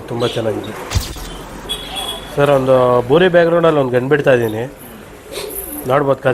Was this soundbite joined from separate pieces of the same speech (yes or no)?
yes